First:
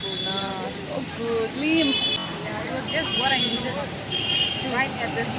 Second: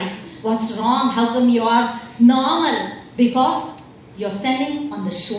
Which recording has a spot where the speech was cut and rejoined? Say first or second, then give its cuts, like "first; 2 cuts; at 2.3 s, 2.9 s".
first; 1 cut; at 2.2 s